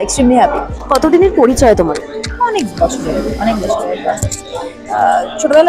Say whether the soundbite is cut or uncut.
uncut